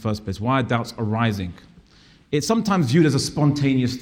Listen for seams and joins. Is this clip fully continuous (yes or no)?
yes